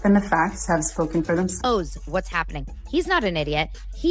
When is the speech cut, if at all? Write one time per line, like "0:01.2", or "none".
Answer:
0:01.5